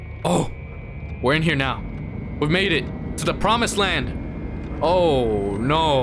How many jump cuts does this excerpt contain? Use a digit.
0